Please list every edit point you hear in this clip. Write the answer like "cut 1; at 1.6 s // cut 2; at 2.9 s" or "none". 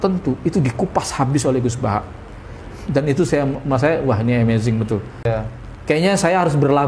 cut 1; at 5.3 s